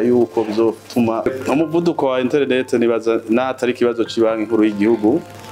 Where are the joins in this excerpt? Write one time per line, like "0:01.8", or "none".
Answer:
0:01.2